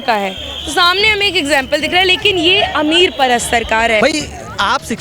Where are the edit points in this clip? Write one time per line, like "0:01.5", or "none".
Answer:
0:04.0

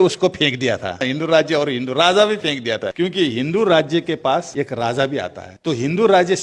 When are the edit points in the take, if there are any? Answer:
0:01.0
0:02.9
0:04.5
0:05.4

